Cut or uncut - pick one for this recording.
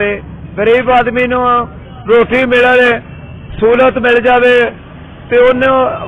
uncut